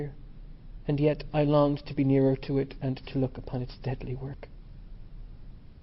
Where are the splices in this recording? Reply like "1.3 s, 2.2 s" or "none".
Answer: 3.4 s